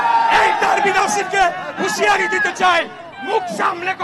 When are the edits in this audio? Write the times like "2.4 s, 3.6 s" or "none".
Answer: none